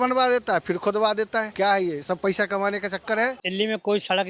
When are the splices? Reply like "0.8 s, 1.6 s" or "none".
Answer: 1.5 s, 3.4 s